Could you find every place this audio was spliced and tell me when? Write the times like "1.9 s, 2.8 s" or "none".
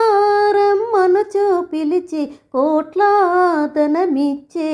none